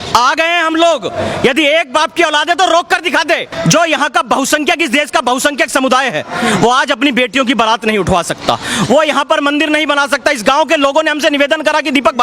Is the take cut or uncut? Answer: cut